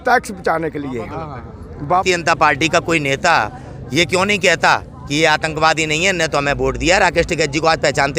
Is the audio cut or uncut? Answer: cut